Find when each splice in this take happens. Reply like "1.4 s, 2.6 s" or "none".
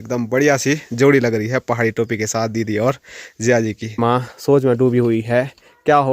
4.0 s